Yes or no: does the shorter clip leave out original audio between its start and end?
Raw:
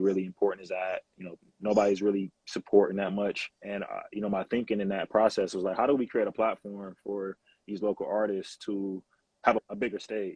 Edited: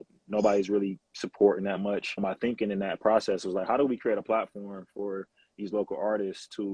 yes